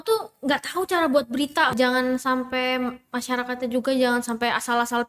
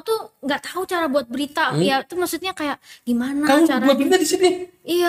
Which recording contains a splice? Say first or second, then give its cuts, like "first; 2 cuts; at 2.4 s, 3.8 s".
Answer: first; 1 cut; at 1.7 s